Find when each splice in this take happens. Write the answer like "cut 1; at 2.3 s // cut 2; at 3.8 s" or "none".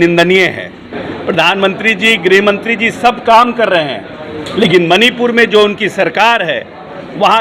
cut 1; at 0.9 s